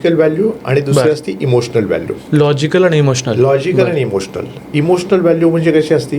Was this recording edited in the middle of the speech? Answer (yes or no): no